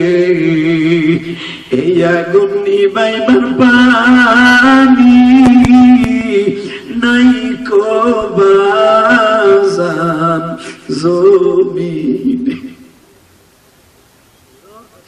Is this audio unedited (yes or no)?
yes